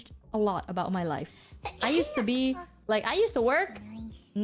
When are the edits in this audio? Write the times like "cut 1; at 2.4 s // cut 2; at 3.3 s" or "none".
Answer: none